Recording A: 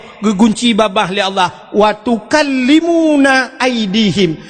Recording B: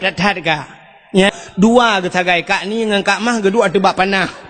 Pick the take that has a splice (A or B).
B